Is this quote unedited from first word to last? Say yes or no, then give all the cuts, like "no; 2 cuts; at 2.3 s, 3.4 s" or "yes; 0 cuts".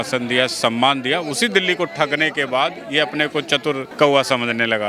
no; 1 cut; at 3.9 s